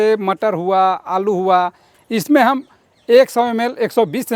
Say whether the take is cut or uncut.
uncut